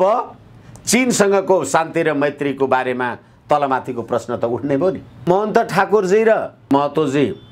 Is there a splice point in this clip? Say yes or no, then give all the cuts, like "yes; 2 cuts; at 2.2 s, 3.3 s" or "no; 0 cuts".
yes; 2 cuts; at 5.2 s, 6.7 s